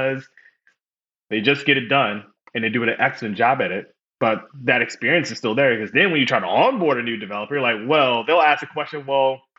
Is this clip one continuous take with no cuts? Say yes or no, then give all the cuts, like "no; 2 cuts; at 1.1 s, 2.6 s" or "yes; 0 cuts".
yes; 0 cuts